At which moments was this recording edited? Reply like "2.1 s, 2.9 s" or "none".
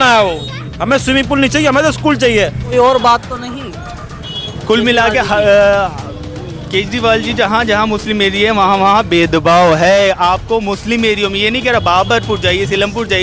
2.7 s